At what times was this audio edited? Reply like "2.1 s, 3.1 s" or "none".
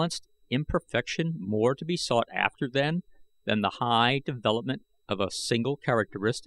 1.4 s